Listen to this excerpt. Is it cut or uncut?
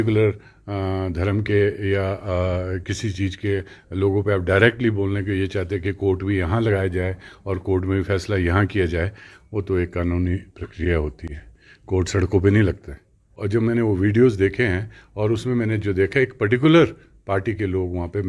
cut